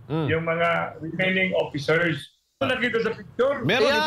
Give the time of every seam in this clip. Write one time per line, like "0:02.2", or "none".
0:02.6